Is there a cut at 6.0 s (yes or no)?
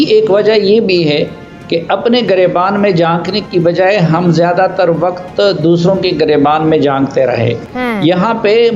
no